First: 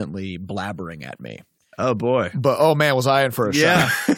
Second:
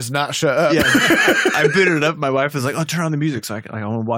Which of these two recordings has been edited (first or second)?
first